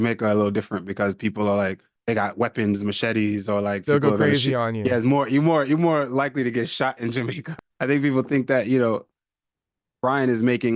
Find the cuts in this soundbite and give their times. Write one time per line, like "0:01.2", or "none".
0:01.9
0:07.4